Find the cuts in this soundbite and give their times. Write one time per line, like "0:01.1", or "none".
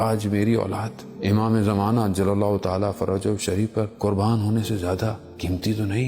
0:01.0
0:03.9
0:05.2